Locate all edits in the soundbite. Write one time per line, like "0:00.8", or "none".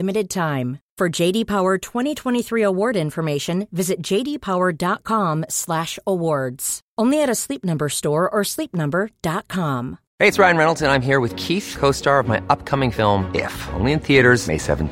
0:10.0